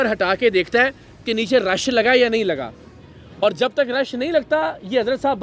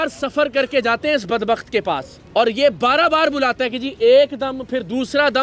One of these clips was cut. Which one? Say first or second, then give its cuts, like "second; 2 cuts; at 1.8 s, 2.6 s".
second; 1 cut; at 2.1 s